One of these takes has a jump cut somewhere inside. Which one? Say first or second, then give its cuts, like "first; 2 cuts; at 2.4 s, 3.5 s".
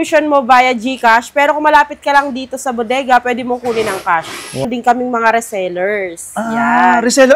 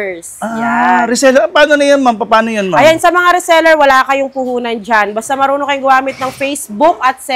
first; 1 cut; at 4.7 s